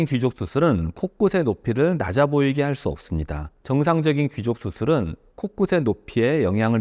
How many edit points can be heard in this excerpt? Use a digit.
1